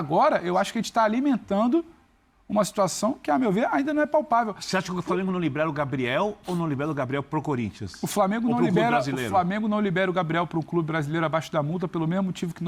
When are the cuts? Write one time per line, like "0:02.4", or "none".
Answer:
none